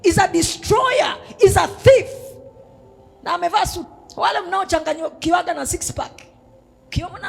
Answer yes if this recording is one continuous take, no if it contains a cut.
no